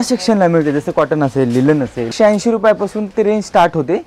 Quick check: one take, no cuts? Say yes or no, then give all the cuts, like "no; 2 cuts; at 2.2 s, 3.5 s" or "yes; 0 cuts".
no; 1 cut; at 2.1 s